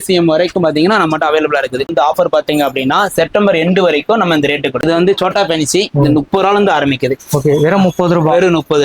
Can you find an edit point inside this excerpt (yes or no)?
yes